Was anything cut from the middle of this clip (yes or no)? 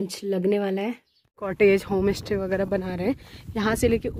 yes